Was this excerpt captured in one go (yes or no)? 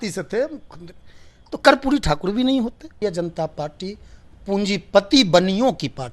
no